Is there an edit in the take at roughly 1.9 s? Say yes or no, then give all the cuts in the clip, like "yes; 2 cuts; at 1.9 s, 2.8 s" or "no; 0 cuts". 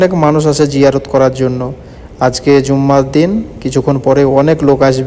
no; 0 cuts